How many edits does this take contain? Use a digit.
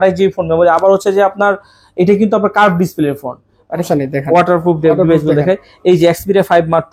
1